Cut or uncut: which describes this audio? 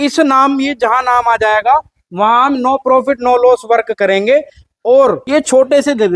cut